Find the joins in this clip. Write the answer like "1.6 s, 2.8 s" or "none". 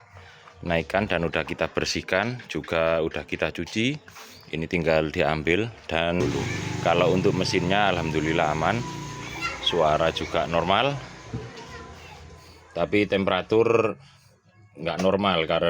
6.2 s